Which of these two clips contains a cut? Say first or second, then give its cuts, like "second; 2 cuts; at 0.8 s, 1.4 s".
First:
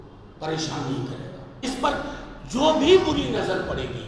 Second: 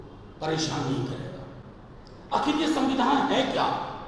first; 1 cut; at 1.6 s